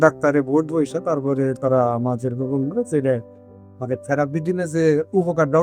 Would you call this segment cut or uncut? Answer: uncut